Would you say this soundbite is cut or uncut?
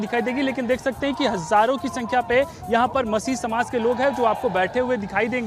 uncut